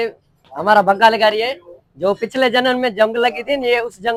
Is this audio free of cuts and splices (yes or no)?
yes